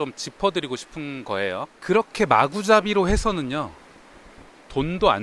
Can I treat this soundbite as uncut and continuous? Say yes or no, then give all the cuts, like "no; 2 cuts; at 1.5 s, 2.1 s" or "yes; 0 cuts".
no; 1 cut; at 1.8 s